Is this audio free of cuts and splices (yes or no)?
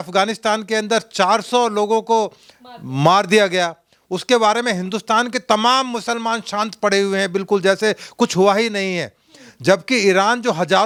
yes